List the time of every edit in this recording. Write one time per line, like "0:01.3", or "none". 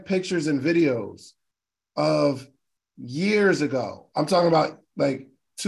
none